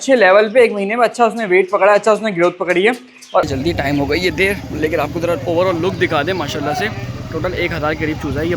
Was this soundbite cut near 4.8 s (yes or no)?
no